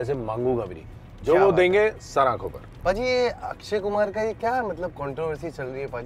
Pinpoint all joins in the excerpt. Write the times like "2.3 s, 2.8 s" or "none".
2.7 s